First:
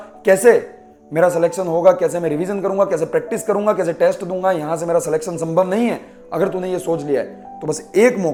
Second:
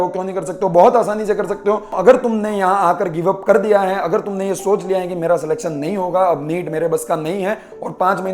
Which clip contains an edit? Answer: second; 1 cut; at 2.0 s

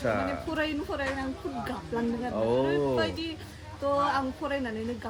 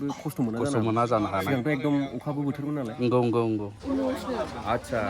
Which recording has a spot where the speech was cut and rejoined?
second; 1 cut; at 3.7 s

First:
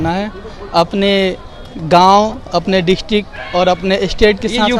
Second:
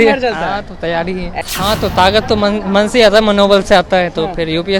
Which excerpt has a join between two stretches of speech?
second; 1 cut; at 1.4 s

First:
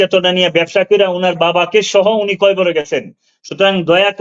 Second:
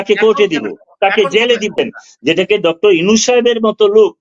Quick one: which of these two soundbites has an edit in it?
second; 1 cut; at 1.7 s

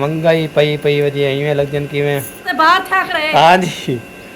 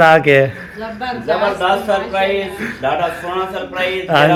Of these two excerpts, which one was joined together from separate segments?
first; 1 cut; at 2.5 s

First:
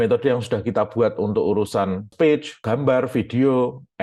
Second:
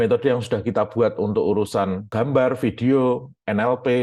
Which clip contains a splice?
second; 1 cut; at 2.0 s

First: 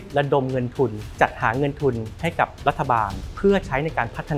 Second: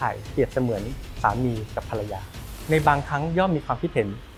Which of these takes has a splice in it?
first; 2 cuts; at 1.0 s, 3.2 s

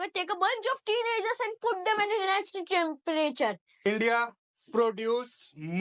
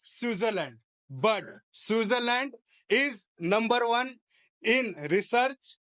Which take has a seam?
first; 1 cut; at 3.8 s

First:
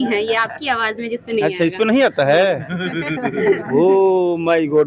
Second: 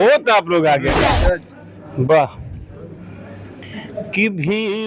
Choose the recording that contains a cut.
second; 1 cut; at 1.1 s

